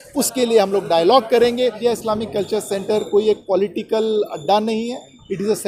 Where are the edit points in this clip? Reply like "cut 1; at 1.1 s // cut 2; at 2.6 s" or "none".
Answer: cut 1; at 1.8 s